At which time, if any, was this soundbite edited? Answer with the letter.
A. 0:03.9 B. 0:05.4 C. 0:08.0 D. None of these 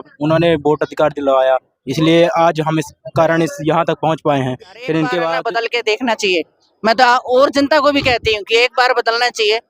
B